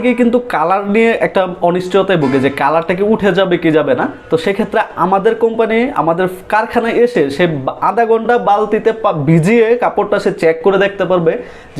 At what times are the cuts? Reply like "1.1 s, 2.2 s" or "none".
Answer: none